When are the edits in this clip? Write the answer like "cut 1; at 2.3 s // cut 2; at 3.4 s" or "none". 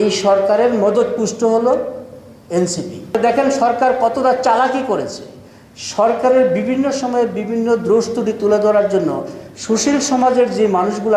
cut 1; at 3.1 s